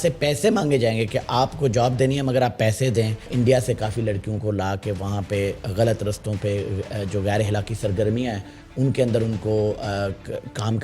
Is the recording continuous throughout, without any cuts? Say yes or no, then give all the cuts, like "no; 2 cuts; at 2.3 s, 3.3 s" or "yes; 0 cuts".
no; 1 cut; at 3.3 s